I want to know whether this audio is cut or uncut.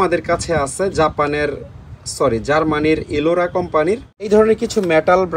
cut